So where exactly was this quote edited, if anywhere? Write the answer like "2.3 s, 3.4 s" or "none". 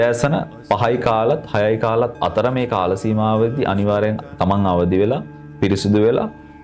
none